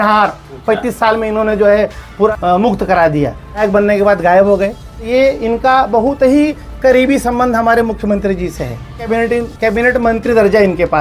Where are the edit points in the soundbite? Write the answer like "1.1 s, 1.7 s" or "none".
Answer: 2.3 s, 3.6 s, 5.1 s, 9.1 s